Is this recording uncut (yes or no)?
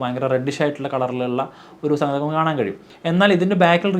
no